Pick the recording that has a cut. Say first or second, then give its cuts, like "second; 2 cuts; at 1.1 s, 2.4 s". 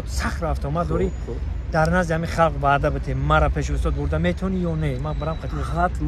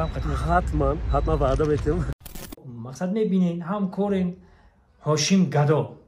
second; 1 cut; at 2.4 s